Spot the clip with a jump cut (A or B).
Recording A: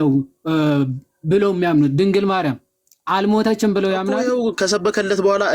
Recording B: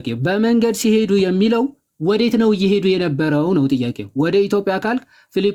A